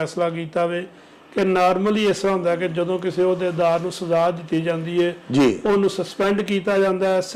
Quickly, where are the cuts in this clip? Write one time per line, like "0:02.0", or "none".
none